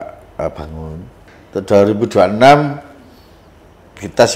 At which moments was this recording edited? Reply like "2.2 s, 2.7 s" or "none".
1.2 s